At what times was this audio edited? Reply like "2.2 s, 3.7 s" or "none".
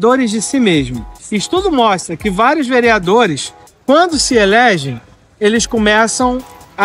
none